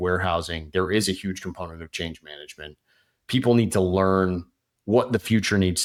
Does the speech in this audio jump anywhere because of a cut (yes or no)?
no